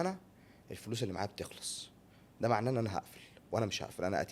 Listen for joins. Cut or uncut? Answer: uncut